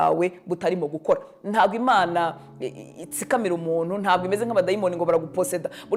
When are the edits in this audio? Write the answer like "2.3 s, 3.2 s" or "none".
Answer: none